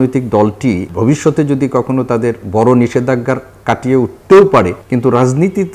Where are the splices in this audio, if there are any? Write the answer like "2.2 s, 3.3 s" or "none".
0.9 s, 4.8 s